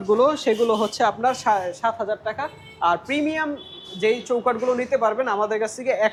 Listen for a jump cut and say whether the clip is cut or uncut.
uncut